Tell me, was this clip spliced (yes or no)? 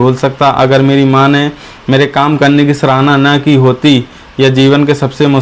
no